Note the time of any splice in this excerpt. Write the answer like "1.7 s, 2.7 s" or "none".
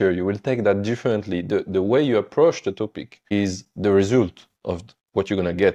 3.2 s, 4.9 s